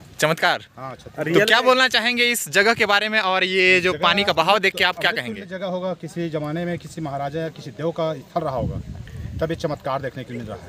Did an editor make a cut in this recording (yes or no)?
no